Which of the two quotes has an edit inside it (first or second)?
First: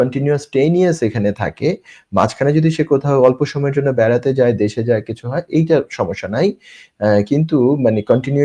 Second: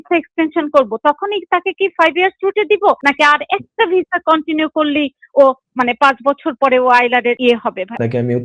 second